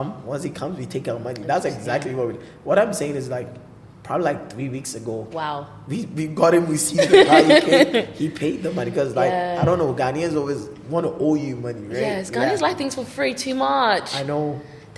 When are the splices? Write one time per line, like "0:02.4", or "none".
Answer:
none